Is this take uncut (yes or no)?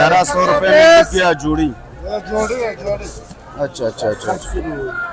yes